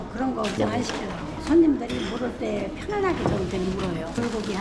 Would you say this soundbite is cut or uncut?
uncut